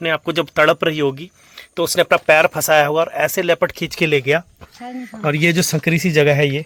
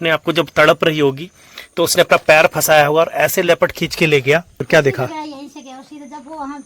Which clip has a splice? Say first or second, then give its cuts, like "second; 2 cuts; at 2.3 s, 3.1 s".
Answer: second; 1 cut; at 4.6 s